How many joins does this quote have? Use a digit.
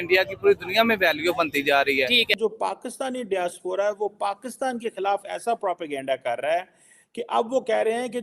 1